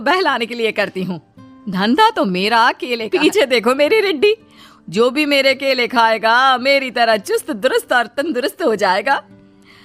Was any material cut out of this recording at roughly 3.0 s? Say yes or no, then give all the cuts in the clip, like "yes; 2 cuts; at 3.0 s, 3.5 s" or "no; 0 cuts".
yes; 1 cut; at 3.0 s